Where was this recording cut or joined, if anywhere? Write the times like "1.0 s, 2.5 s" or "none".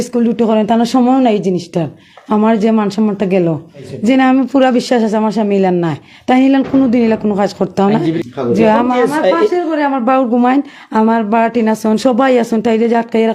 3.8 s, 8.2 s